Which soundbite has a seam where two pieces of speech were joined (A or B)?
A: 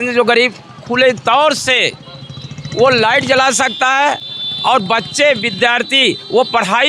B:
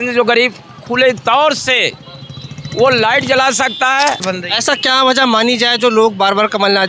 B